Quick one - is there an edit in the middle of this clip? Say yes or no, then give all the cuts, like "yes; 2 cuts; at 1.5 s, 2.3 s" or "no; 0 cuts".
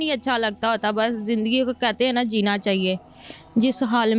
no; 0 cuts